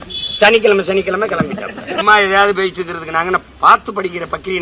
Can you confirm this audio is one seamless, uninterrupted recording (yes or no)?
no